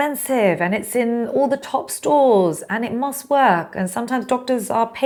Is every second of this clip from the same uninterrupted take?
yes; 0 cuts

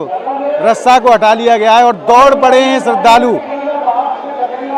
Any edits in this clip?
no; 0 cuts

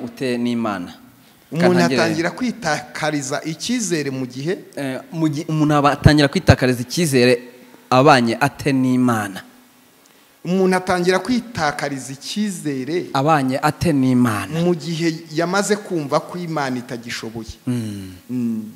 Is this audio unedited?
yes; 0 cuts

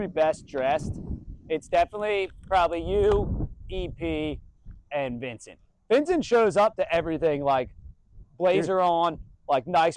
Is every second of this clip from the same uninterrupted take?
yes; 0 cuts

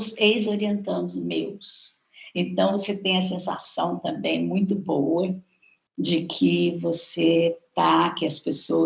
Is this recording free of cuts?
yes; 0 cuts

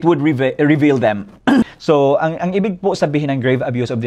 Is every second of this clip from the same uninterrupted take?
no; 1 cut; at 1.6 s

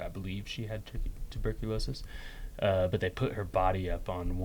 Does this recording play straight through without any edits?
yes; 0 cuts

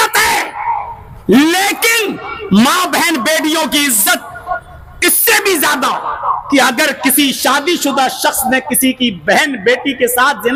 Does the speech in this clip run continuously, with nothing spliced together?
yes; 0 cuts

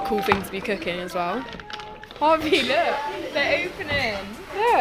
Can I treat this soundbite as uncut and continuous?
no; 1 cut; at 2.1 s

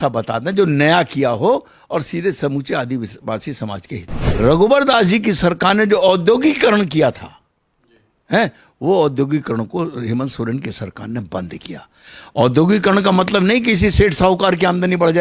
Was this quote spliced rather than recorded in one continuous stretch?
yes; 1 cut; at 4.2 s

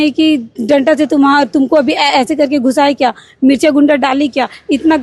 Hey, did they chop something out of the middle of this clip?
no; 0 cuts

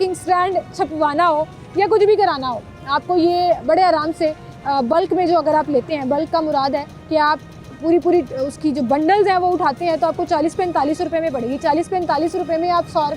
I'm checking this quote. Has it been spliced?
no; 0 cuts

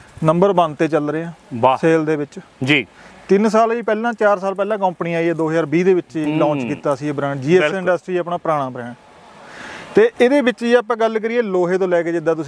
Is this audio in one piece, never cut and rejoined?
yes; 0 cuts

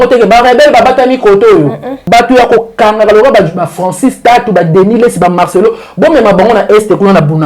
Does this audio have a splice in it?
yes; 1 cut; at 2.0 s

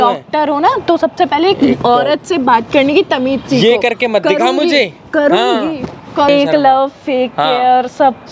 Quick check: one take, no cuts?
no; 1 cut; at 6.3 s

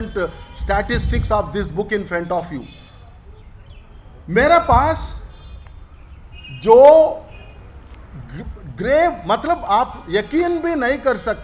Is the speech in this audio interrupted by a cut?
no; 0 cuts

